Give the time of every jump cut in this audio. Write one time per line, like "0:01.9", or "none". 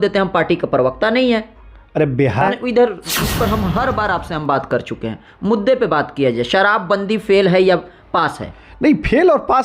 0:02.5